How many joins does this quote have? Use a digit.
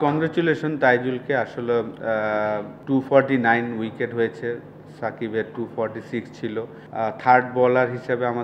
2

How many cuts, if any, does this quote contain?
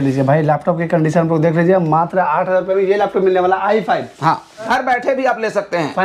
1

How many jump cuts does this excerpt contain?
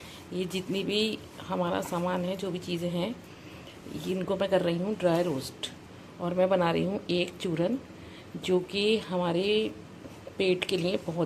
0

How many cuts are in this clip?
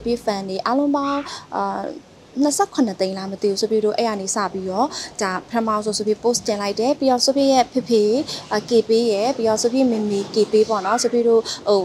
0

